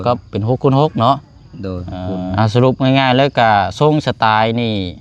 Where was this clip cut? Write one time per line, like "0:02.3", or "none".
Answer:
0:02.3